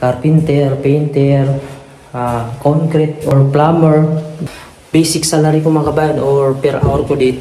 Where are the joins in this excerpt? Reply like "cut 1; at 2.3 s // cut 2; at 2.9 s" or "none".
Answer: cut 1; at 3.3 s // cut 2; at 4.5 s